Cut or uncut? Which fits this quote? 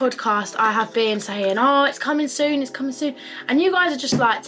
uncut